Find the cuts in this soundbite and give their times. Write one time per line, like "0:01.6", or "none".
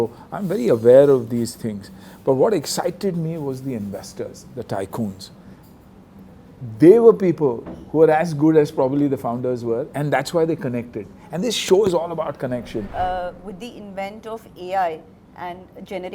0:12.8